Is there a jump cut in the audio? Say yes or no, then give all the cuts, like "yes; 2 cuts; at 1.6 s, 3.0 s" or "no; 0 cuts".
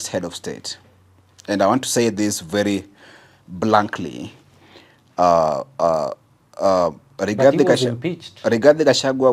no; 0 cuts